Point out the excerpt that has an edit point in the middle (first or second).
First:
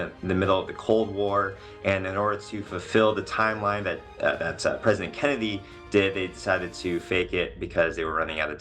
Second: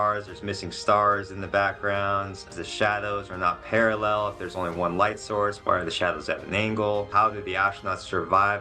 second